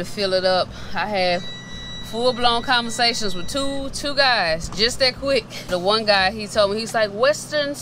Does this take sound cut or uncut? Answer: cut